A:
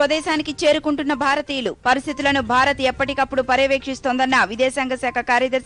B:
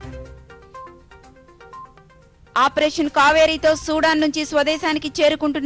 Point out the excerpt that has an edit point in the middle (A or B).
B